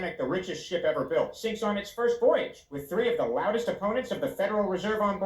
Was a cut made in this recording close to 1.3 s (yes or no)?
no